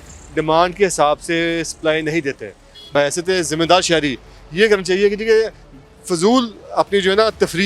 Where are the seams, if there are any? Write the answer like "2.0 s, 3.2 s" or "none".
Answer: 2.9 s